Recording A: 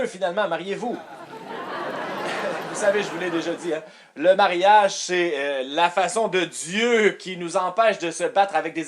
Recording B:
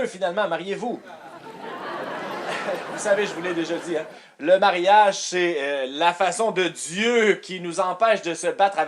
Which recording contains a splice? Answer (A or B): A